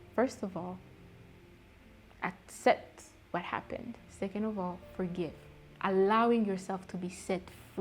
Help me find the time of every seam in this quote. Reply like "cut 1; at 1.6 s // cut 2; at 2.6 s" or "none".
cut 1; at 5.7 s

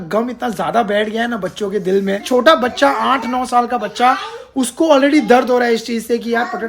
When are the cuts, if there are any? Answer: cut 1; at 2.3 s

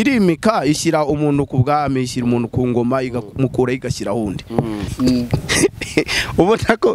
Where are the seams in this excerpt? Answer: cut 1; at 4.9 s

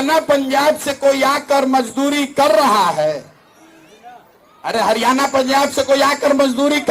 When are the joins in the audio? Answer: none

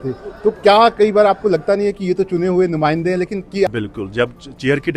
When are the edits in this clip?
cut 1; at 3.5 s

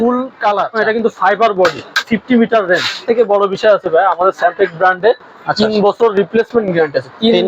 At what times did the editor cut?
cut 1; at 0.8 s // cut 2; at 2.1 s // cut 3; at 3.0 s

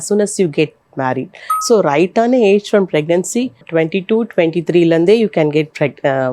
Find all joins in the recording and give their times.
cut 1; at 1.5 s // cut 2; at 3.6 s

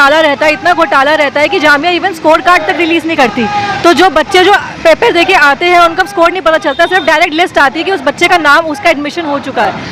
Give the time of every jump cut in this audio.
none

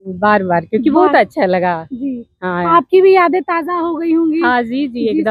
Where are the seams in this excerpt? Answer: none

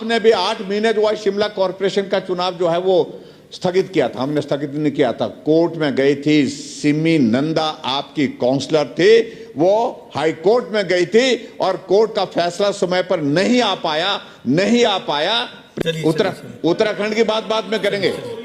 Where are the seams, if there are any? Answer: cut 1; at 15.6 s

